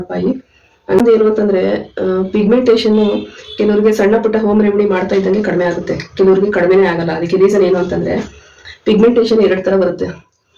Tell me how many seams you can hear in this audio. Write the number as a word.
one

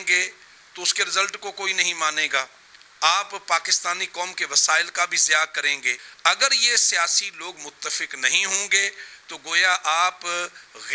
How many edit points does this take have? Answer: one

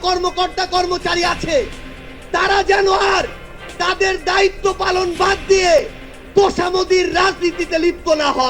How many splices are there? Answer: zero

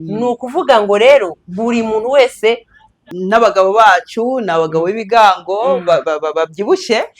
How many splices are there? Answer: one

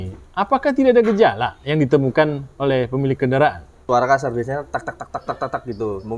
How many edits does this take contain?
one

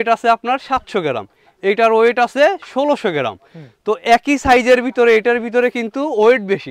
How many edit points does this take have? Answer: zero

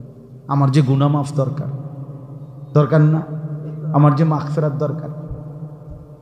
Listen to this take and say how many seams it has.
zero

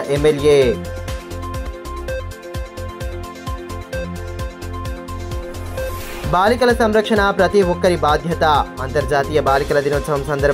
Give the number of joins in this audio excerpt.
zero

